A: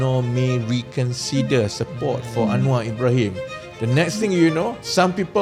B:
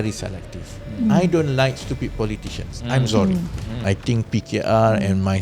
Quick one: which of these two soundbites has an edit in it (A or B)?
B